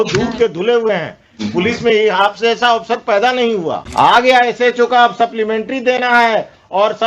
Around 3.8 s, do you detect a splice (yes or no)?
yes